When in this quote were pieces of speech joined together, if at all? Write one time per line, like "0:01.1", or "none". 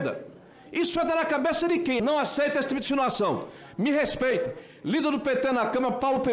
0:02.0

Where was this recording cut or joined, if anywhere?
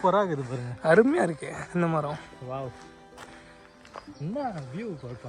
0:03.7

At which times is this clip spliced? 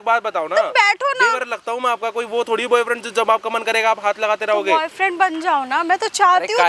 none

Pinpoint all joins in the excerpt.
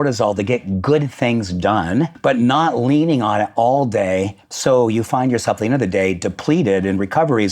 0:02.1

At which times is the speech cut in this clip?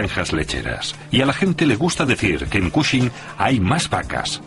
0:01.7

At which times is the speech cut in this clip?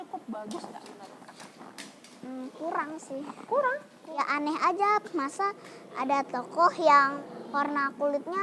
0:04.2
0:07.2

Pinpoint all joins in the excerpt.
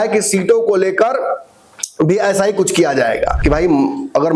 0:03.4

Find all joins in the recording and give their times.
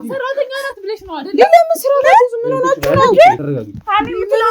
none

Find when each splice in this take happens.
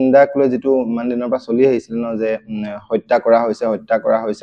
none

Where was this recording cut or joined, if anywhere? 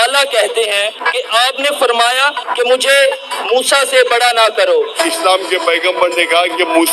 0:01.1
0:02.5
0:05.0

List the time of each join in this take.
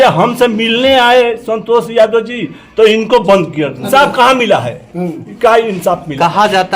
0:03.9

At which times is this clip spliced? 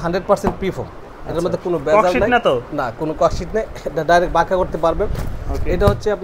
none

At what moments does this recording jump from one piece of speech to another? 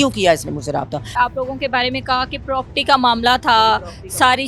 0:01.1

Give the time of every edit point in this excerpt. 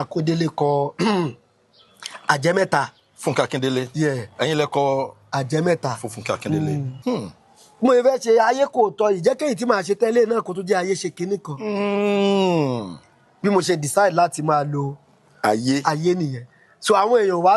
0:06.9

